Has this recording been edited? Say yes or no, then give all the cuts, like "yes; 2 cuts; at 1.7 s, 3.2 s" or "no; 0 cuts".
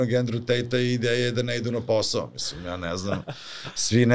no; 0 cuts